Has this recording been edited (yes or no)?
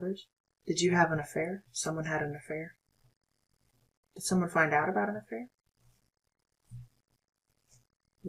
no